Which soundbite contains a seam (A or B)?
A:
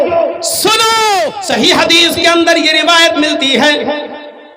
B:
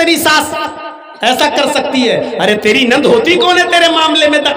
A